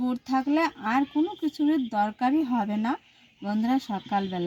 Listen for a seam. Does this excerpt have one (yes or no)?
no